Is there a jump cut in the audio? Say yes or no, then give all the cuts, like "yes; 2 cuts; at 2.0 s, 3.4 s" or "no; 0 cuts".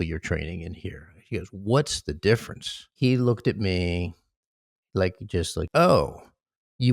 yes; 2 cuts; at 2.9 s, 5.6 s